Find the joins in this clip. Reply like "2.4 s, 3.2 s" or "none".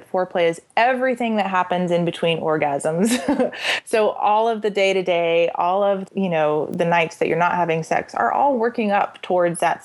6.0 s